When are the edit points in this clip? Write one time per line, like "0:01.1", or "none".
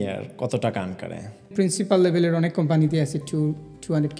0:01.5